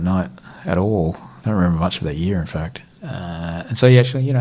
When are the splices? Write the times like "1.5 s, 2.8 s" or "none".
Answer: none